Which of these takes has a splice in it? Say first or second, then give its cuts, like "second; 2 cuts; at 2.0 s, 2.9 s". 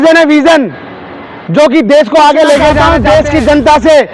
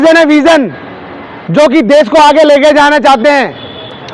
first; 1 cut; at 2.8 s